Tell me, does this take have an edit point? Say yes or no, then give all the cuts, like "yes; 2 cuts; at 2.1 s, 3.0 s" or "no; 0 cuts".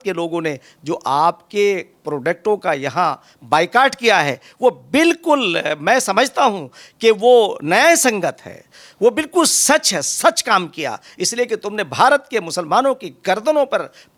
no; 0 cuts